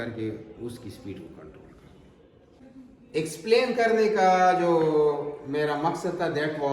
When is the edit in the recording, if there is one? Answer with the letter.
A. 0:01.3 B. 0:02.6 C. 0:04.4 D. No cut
B